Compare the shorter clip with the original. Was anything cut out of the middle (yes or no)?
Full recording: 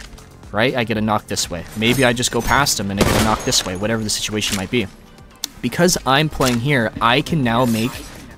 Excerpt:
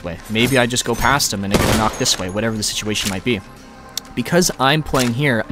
no